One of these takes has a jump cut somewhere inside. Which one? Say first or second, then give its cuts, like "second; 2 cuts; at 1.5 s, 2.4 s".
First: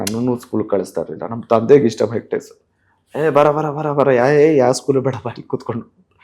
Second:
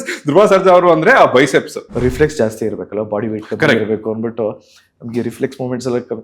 second; 1 cut; at 1.8 s